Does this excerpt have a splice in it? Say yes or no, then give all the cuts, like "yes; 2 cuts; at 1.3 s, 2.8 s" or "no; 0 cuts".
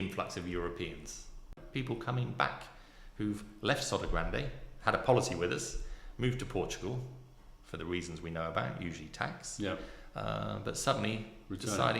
yes; 1 cut; at 1.5 s